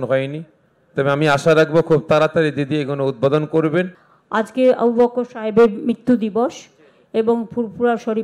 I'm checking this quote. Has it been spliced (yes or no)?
yes